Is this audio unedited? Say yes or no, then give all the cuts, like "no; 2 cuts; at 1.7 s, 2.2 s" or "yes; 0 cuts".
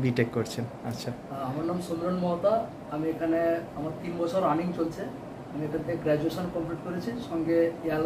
yes; 0 cuts